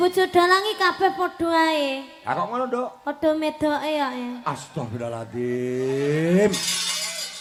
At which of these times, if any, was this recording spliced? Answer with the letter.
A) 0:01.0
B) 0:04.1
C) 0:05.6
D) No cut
D